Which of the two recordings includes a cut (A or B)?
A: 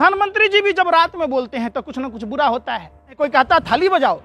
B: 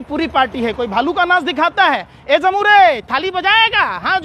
A